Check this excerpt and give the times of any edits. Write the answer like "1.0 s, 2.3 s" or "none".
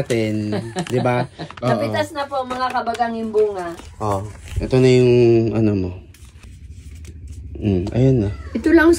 1.5 s, 3.7 s, 6.5 s